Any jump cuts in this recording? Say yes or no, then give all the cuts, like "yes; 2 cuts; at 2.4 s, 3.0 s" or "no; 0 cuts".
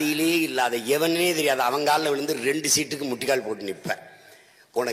no; 0 cuts